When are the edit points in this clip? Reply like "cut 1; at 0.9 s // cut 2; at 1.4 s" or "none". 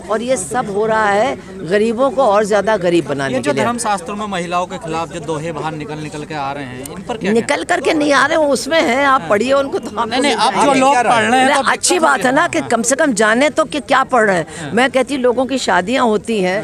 none